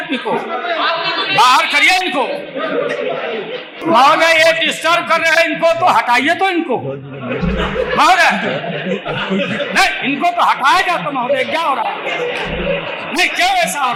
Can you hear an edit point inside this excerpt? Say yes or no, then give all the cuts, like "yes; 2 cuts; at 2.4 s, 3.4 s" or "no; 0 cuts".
no; 0 cuts